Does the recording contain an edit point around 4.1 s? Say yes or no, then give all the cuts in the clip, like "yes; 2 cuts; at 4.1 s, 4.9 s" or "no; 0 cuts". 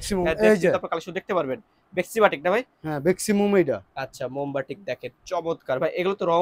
no; 0 cuts